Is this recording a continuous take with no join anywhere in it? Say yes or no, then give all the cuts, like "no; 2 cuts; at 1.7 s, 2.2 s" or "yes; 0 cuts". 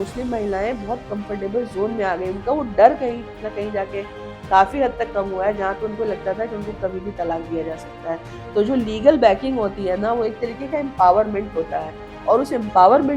yes; 0 cuts